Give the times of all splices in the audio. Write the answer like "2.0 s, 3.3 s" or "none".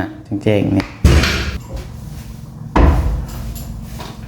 1.6 s